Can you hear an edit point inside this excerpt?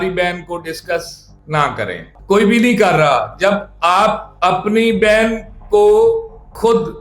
yes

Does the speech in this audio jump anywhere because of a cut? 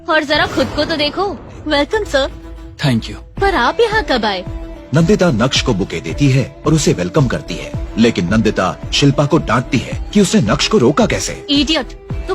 yes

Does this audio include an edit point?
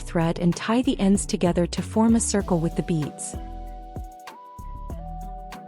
no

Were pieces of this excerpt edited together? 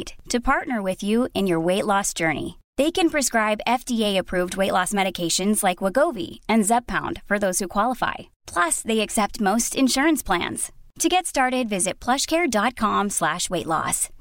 no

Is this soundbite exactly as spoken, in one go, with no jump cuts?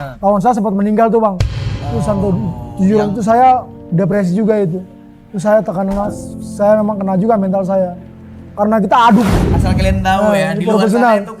no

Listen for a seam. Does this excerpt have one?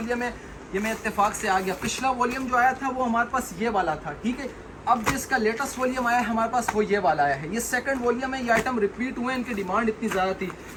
no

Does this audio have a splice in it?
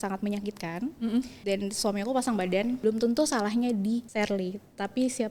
yes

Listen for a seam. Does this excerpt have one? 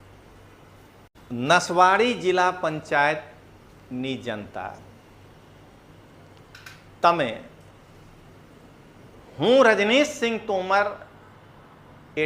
yes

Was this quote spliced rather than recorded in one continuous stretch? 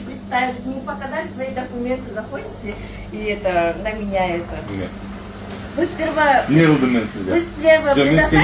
no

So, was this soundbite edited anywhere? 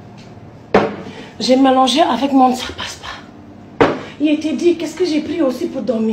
yes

